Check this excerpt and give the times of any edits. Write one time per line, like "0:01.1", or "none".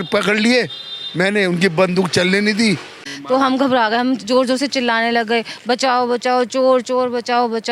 0:03.1